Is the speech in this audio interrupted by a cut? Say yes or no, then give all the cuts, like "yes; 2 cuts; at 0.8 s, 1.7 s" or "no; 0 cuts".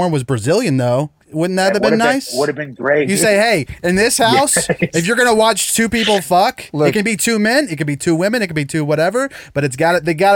yes; 2 cuts; at 1.2 s, 3.1 s